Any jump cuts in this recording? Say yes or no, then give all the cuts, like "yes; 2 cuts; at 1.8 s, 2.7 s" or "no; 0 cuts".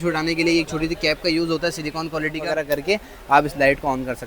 yes; 1 cut; at 2.5 s